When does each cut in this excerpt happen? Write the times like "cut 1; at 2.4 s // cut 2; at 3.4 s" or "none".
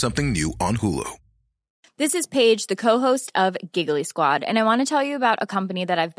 cut 1; at 1.7 s